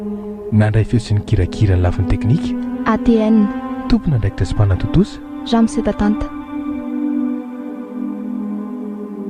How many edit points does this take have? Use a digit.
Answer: 1